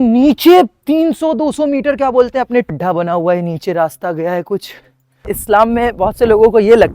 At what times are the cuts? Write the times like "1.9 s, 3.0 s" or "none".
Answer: 2.7 s, 5.3 s